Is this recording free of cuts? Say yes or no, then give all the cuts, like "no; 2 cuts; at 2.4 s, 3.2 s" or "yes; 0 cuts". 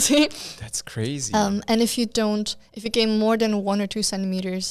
yes; 0 cuts